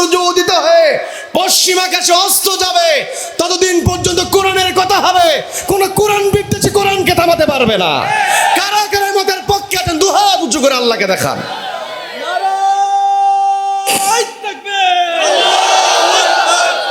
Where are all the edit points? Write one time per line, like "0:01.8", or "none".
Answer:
none